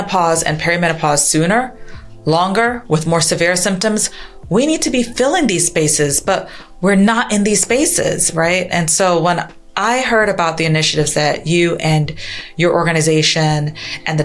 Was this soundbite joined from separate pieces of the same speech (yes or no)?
no